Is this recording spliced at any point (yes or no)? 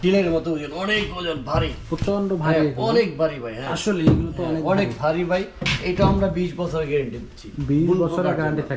no